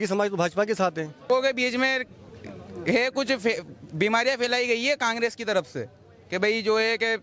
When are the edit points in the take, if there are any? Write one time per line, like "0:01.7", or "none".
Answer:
0:01.3